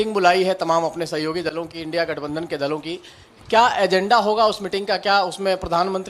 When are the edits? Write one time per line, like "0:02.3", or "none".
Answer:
none